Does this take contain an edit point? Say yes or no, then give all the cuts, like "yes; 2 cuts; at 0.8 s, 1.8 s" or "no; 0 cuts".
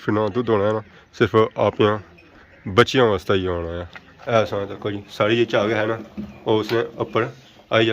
yes; 1 cut; at 4.3 s